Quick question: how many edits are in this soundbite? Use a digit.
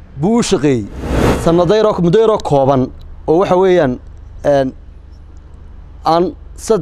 1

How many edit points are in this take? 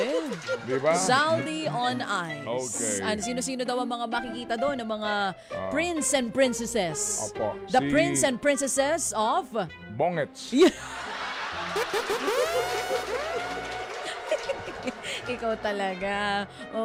0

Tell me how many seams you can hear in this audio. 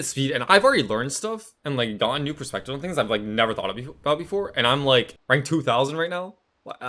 1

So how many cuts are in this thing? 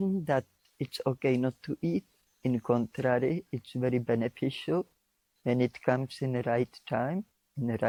0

